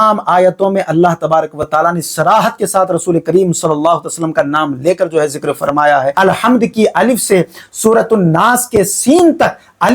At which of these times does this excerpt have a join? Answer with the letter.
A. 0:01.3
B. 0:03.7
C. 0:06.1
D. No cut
C